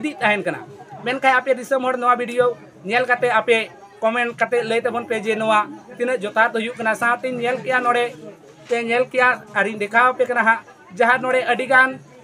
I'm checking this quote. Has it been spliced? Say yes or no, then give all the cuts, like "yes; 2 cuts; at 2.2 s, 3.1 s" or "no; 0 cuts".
no; 0 cuts